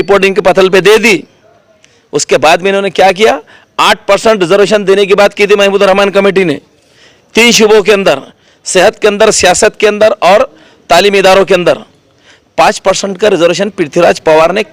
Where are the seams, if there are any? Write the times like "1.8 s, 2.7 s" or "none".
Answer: none